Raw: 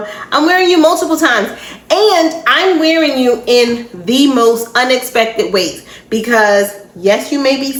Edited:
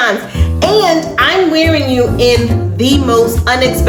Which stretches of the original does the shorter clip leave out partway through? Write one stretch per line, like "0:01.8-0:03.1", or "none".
none